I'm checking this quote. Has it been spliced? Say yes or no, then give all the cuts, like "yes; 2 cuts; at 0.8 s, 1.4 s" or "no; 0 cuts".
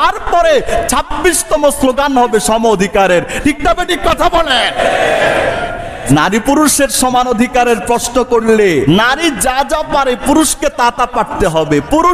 yes; 2 cuts; at 6.1 s, 8.9 s